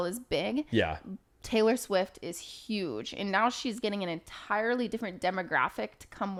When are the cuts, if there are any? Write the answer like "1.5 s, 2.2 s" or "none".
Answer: none